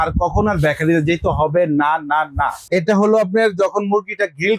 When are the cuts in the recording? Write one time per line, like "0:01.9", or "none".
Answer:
0:02.6